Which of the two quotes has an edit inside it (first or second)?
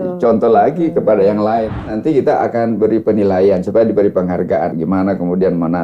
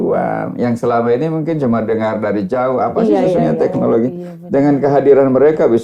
first